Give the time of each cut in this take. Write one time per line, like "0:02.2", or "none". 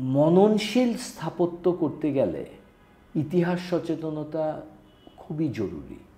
none